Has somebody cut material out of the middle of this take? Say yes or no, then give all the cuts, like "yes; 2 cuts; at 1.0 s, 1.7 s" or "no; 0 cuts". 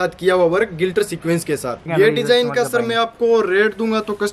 yes; 1 cut; at 1.8 s